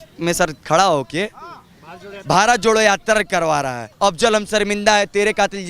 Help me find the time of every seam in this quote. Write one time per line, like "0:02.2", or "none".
0:03.9